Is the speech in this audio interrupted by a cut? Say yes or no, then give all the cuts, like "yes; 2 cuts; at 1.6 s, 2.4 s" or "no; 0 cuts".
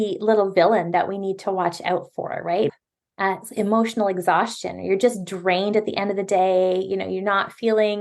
yes; 1 cut; at 2.7 s